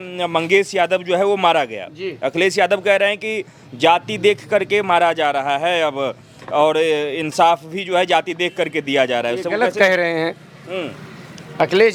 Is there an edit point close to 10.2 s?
no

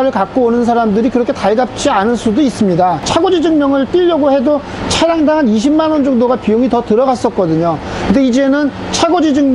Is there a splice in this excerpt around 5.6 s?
no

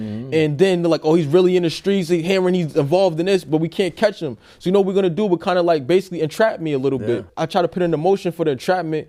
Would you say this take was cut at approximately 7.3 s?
no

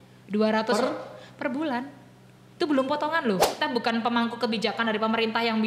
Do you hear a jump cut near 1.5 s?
no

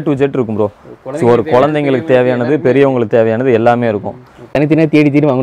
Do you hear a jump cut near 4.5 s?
yes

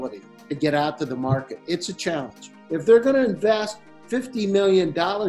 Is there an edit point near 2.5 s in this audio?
yes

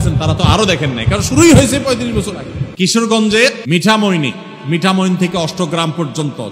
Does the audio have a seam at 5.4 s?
no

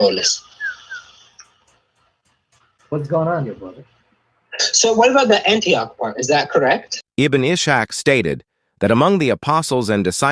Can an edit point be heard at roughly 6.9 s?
yes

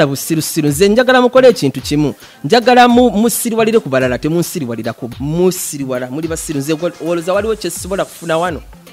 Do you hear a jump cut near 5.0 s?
yes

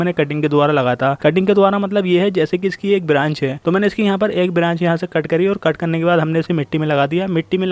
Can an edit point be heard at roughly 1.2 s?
no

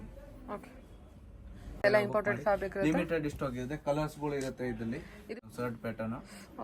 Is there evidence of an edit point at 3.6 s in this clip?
no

